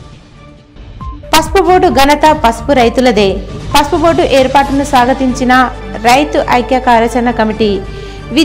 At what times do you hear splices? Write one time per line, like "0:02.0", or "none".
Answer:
none